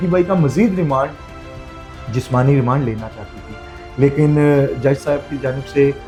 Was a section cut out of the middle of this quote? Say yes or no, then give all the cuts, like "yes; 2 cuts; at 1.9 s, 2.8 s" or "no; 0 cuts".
no; 0 cuts